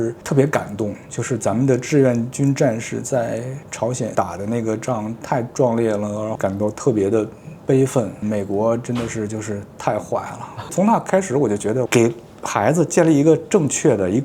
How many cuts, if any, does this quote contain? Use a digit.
4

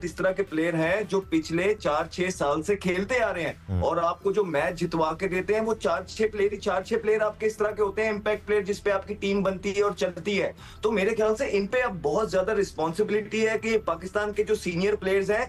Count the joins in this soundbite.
0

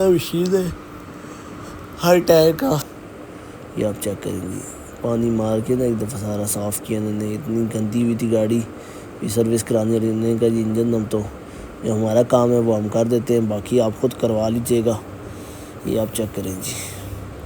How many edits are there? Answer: 1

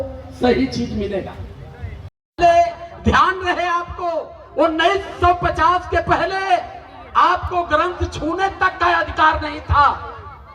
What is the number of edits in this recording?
1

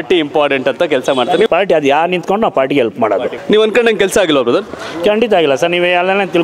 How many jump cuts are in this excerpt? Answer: 2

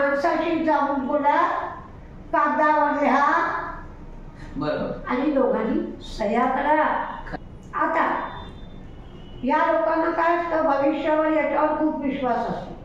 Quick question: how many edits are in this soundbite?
1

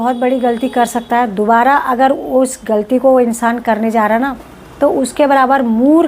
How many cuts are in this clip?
0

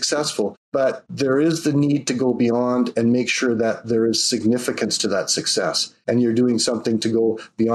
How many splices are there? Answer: 2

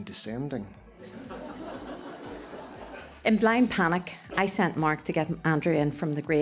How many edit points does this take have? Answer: 2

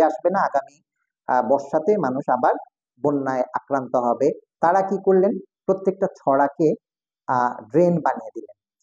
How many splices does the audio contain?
1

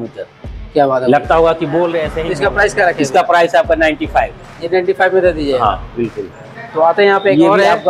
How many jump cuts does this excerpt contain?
1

